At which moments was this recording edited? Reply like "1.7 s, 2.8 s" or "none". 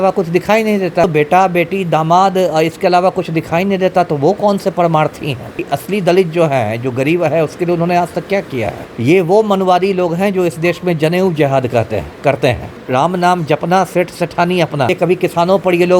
1.0 s, 5.6 s, 8.8 s, 12.7 s, 14.9 s

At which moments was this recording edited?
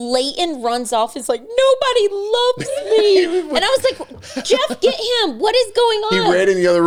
none

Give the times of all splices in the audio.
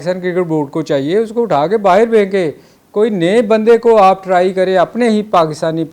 none

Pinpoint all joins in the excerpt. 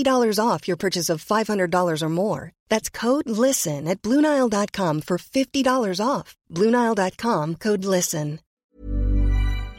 8.8 s

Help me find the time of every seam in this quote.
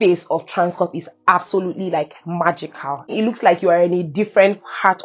3.2 s

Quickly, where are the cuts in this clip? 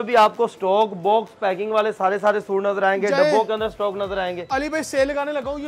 none

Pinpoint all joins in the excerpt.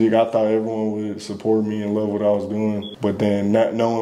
2.9 s

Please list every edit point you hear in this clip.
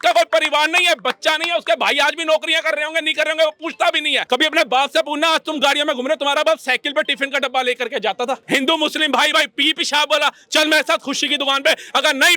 4.1 s, 8.4 s

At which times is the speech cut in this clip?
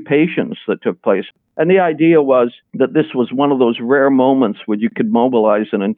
1.3 s

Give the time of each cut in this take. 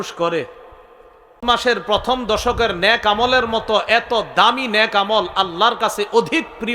1.4 s

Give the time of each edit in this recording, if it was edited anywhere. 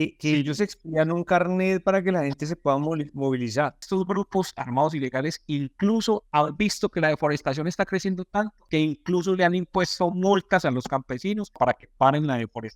3.8 s, 6.2 s, 8.6 s, 11.5 s

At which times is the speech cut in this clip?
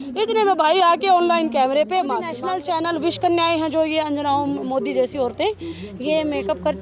2.3 s

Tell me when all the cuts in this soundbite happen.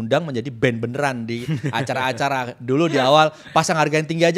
none

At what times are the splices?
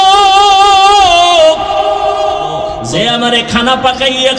2.8 s

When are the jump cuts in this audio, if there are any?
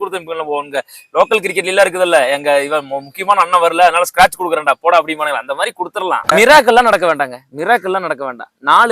6.2 s

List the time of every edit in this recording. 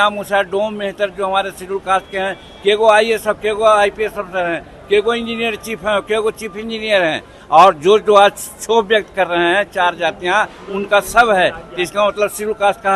none

